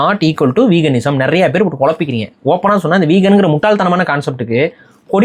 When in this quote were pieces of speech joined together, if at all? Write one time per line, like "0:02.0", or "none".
none